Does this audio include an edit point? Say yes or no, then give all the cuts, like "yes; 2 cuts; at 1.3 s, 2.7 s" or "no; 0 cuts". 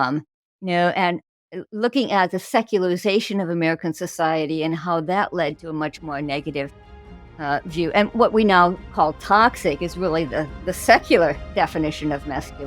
yes; 1 cut; at 11.4 s